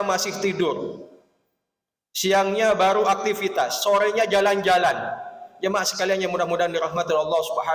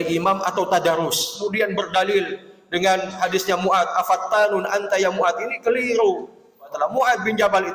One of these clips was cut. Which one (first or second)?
second